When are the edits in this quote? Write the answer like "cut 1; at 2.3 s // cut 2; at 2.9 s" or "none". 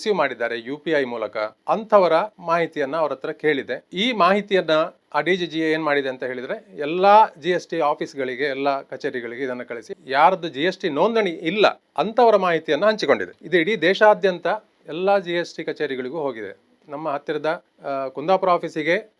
cut 1; at 1.6 s // cut 2; at 2.4 s // cut 3; at 3.8 s // cut 4; at 5.0 s // cut 5; at 9.7 s // cut 6; at 11.8 s